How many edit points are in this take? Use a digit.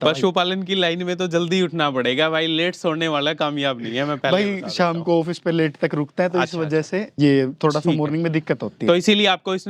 1